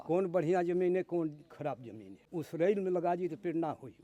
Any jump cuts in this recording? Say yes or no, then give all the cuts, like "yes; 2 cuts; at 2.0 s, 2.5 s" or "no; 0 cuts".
no; 0 cuts